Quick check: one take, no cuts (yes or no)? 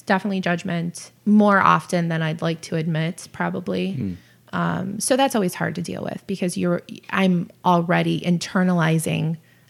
no